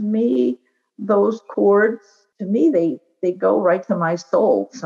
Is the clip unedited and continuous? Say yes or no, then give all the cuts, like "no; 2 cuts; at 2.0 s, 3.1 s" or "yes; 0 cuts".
no; 1 cut; at 2.3 s